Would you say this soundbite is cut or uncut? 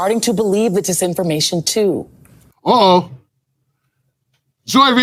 uncut